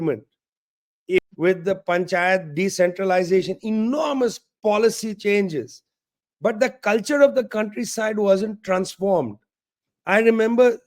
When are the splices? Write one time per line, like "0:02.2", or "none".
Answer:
0:01.2